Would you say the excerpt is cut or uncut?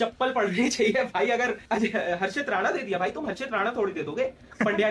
uncut